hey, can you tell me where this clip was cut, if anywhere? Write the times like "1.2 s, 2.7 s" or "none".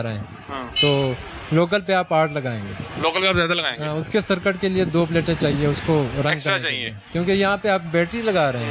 none